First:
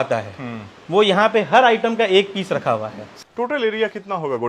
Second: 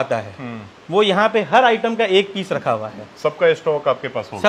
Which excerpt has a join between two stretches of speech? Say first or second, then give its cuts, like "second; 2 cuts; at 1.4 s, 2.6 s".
first; 1 cut; at 3.1 s